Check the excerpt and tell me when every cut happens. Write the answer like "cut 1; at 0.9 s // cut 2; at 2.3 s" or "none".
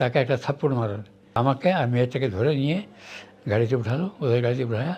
cut 1; at 1.4 s